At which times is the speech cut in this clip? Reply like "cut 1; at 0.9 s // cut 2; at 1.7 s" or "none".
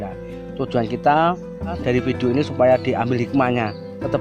cut 1; at 1.8 s